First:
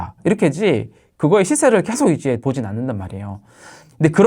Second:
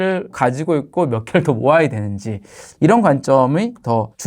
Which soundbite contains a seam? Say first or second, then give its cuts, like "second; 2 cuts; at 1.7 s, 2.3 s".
first; 1 cut; at 2.4 s